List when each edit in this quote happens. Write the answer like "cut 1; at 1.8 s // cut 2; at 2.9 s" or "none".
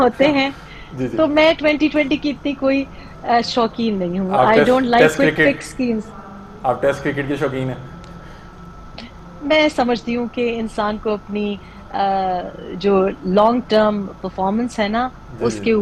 none